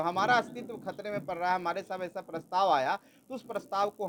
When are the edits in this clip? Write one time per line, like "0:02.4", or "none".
none